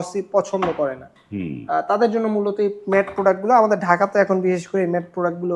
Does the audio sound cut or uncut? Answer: uncut